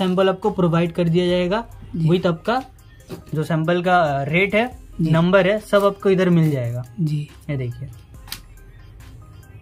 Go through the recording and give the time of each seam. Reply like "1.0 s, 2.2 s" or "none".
none